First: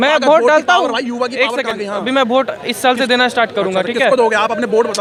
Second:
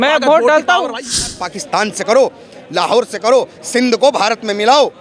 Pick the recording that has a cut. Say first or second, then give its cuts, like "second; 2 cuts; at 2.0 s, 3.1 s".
second; 1 cut; at 1.3 s